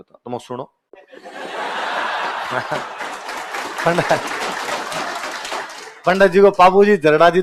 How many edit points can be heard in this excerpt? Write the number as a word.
zero